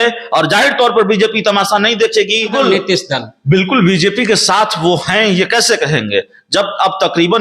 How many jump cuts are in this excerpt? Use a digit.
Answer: 1